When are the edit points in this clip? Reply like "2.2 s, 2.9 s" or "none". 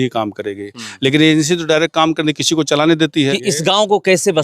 3.4 s